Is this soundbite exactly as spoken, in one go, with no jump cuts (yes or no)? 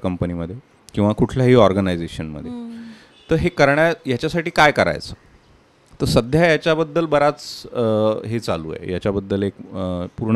yes